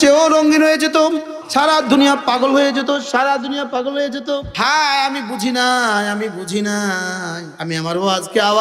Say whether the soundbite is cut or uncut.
cut